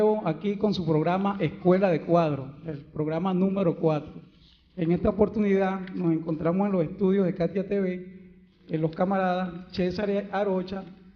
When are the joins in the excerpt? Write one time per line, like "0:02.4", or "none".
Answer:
none